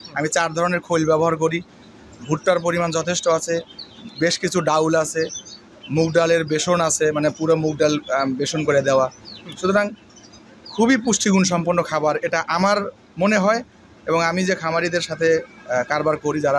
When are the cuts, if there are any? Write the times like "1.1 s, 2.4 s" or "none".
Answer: none